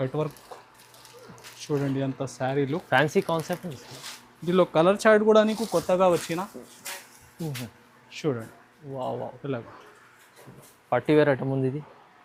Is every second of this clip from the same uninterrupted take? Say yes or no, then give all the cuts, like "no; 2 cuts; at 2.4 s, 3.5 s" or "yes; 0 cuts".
yes; 0 cuts